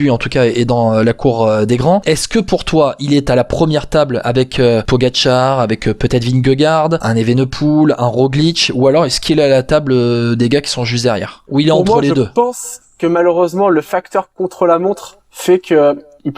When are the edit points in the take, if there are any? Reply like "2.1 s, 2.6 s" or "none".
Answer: 2.0 s, 4.8 s, 7.0 s, 11.3 s